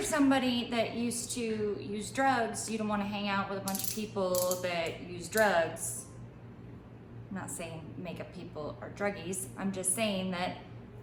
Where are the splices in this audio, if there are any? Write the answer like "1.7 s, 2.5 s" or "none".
none